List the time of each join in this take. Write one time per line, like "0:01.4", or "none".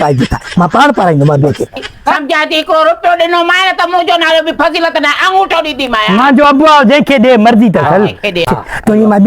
0:02.1